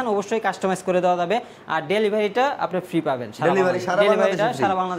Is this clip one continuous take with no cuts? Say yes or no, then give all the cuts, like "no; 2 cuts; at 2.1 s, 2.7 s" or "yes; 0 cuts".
yes; 0 cuts